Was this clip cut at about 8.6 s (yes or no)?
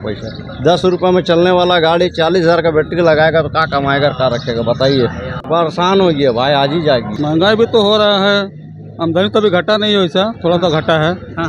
no